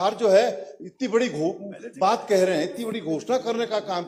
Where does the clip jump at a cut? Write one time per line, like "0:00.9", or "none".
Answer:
none